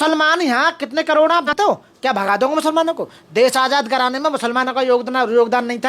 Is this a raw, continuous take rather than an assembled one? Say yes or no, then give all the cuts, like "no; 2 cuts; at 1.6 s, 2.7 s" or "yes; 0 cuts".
no; 1 cut; at 1.5 s